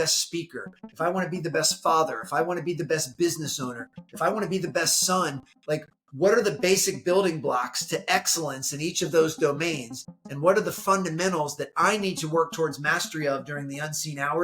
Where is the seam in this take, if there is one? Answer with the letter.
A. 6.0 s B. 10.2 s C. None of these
C